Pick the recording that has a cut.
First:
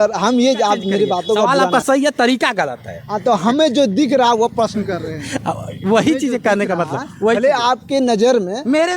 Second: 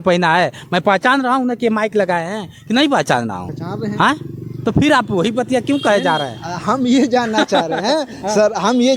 first; 1 cut; at 1.5 s

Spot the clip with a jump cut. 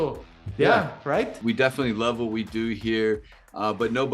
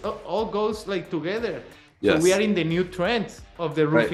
first; 1 cut; at 1.4 s

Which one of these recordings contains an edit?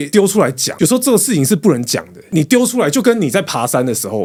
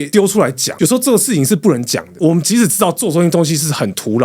second; 1 cut; at 2.1 s

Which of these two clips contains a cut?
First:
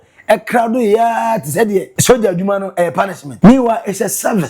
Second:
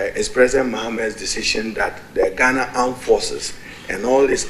first; 2 cuts; at 1.9 s, 3.2 s

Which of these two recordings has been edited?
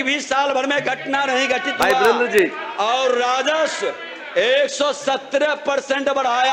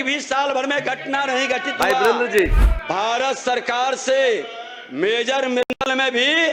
second; 1 cut; at 2.6 s

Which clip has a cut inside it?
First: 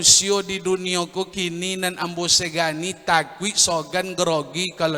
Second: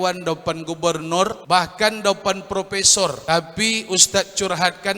second; 2 cuts; at 1.4 s, 3.2 s

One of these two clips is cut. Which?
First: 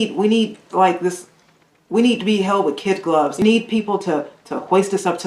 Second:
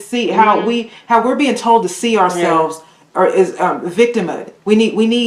first; 1 cut; at 3.4 s

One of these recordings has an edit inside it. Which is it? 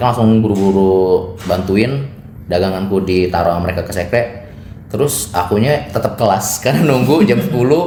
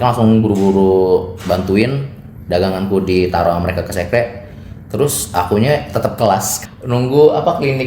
second; 1 cut; at 6.5 s

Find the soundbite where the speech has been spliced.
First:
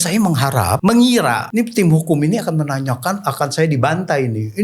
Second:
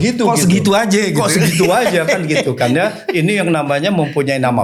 first; 2 cuts; at 0.8 s, 1.4 s

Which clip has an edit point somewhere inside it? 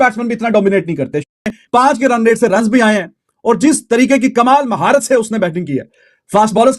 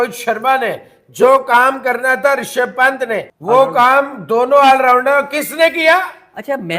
second; 1 cut; at 3.3 s

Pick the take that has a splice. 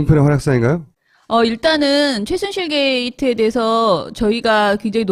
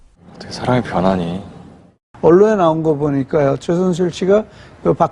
second; 1 cut; at 1.1 s

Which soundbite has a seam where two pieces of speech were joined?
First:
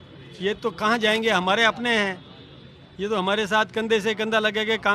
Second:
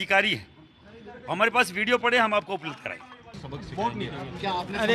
second; 1 cut; at 3.2 s

